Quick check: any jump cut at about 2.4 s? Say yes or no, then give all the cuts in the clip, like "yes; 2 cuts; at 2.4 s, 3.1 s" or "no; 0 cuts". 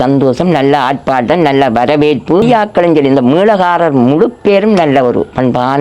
yes; 1 cut; at 2.4 s